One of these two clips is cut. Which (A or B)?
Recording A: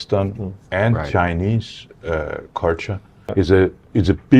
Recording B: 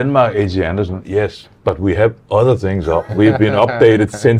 A